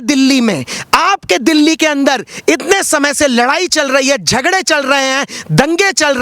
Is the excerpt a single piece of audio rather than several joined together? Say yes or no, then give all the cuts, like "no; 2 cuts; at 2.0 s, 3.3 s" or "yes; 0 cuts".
yes; 0 cuts